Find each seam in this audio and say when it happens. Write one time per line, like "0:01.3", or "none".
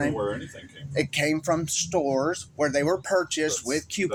none